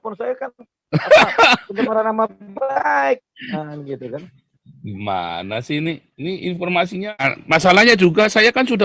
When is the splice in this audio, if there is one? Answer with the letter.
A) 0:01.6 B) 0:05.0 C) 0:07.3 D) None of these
C